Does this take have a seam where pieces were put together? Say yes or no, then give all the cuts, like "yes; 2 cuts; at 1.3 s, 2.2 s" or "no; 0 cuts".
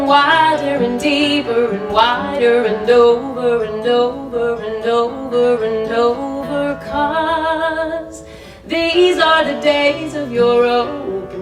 no; 0 cuts